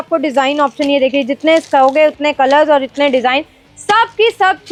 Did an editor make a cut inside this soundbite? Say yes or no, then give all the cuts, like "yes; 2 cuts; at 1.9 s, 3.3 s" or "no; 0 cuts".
no; 0 cuts